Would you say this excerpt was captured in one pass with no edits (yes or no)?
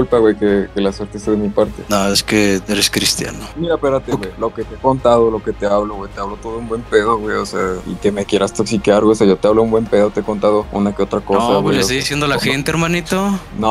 yes